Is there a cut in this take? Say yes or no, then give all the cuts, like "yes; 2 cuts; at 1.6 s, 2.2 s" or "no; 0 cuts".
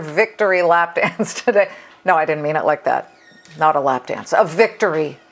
yes; 1 cut; at 4.2 s